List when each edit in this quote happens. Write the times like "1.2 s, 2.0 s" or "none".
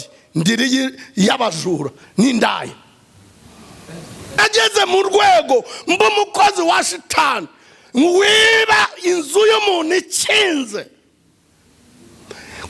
4.4 s